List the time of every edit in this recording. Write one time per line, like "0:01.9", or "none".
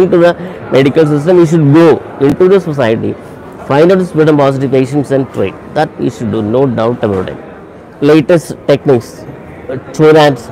0:07.8